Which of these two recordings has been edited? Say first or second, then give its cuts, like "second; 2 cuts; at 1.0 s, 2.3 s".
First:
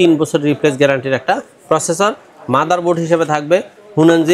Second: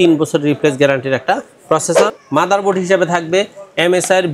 second; 1 cut; at 2.2 s